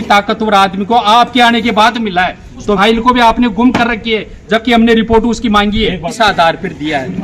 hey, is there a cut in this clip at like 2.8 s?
yes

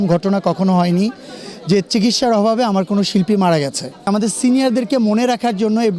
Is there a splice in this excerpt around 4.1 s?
yes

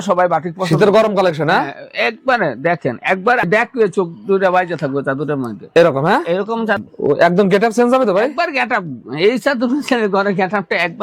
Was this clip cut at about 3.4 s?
yes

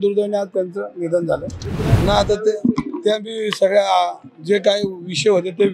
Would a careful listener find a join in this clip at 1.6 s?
yes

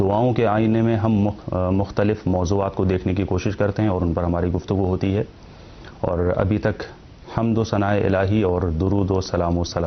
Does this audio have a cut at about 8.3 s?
no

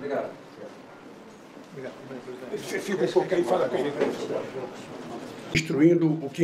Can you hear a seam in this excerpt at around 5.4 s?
yes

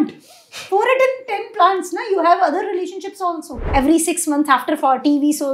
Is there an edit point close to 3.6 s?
yes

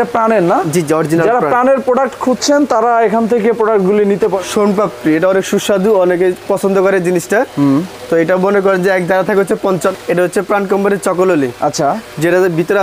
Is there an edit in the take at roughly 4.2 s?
yes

